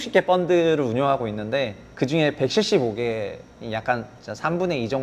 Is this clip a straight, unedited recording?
no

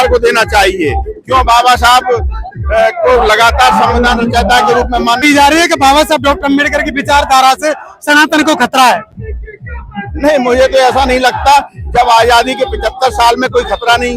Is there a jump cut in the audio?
yes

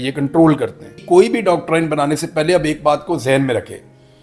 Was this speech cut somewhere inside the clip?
yes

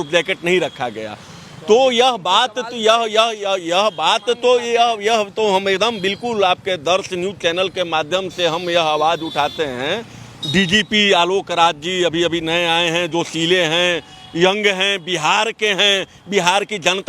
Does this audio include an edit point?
no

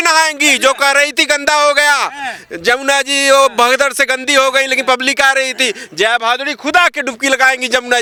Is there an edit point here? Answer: no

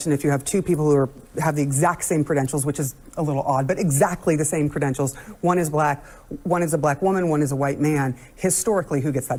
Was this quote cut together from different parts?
no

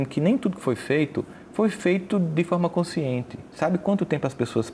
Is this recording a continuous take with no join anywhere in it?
yes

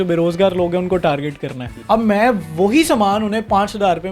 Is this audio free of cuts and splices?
no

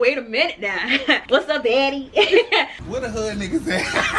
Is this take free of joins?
no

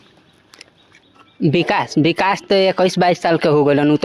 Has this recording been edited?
no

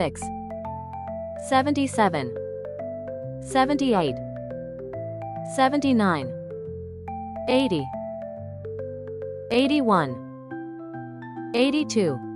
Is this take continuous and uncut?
yes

